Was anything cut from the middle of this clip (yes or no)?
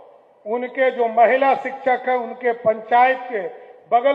no